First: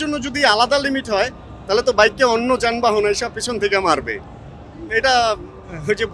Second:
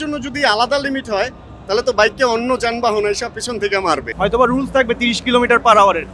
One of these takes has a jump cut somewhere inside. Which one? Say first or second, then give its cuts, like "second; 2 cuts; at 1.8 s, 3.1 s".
second; 1 cut; at 4.1 s